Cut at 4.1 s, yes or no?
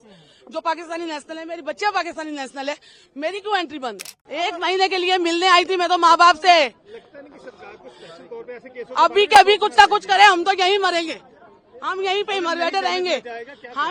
yes